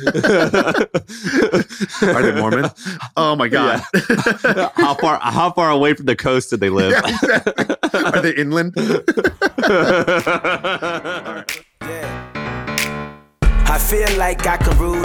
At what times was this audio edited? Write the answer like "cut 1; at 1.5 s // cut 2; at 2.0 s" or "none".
cut 1; at 11.2 s